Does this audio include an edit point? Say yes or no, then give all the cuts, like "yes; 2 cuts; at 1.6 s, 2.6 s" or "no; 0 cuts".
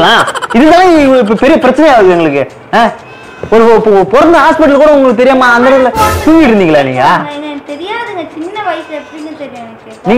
no; 0 cuts